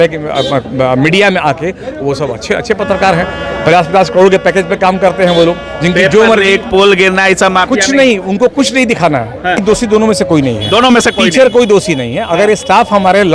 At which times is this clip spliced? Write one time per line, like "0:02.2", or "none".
0:09.6